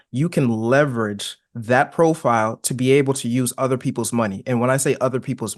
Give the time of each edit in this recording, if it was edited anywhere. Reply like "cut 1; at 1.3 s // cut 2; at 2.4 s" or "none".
none